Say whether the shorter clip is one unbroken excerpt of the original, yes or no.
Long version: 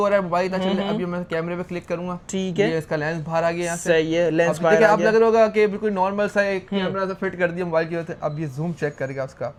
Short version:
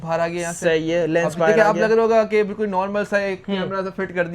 yes